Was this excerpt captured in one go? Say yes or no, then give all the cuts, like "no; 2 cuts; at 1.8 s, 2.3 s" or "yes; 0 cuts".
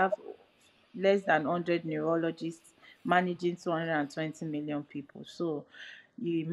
yes; 0 cuts